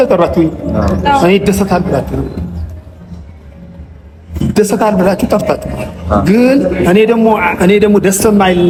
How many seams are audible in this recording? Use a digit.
0